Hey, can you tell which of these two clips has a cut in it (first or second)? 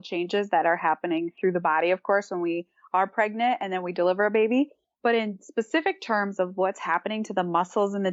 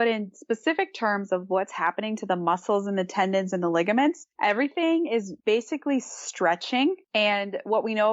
second